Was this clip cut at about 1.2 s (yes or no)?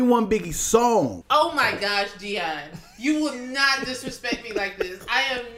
yes